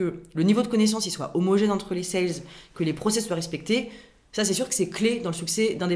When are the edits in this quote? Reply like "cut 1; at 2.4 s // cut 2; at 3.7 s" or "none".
none